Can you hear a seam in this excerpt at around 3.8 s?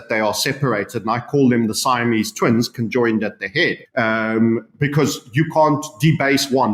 yes; 1 cut; at 3.8 s

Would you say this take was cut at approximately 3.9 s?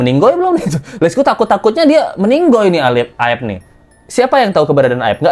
no; 0 cuts

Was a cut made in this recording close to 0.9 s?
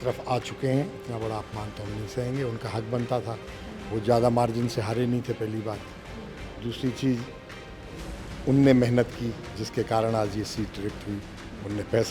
yes; 1 cut; at 0.9 s

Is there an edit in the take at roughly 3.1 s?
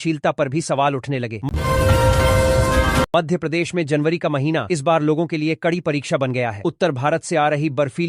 yes; 2 cuts; at 1.5 s, 3.1 s

